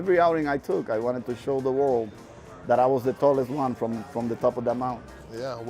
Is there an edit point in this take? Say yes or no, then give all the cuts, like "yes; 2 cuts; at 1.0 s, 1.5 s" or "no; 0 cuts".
no; 0 cuts